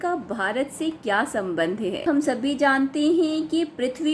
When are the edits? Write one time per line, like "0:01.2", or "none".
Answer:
0:02.0